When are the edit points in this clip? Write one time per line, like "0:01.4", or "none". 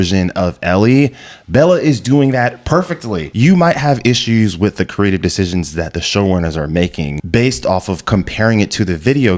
0:03.3
0:07.2